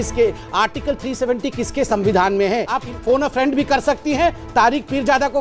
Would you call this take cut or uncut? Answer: cut